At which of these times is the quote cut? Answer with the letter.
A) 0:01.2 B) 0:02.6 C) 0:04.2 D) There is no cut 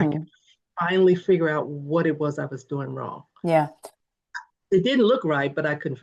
D